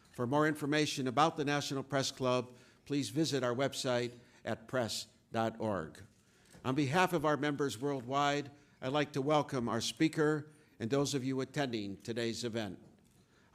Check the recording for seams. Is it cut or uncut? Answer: uncut